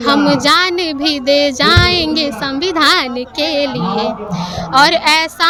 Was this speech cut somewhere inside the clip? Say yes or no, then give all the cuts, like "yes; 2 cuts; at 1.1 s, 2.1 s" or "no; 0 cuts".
no; 0 cuts